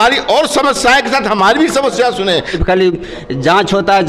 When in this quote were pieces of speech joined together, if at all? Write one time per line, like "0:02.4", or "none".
0:02.6